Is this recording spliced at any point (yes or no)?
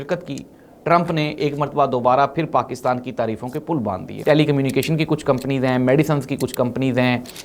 yes